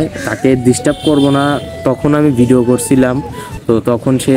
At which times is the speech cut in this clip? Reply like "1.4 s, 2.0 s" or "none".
none